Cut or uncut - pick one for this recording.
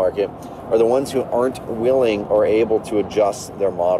uncut